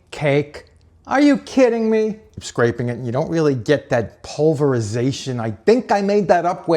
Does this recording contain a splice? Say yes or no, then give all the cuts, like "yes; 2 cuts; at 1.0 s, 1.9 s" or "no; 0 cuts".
yes; 1 cut; at 2.3 s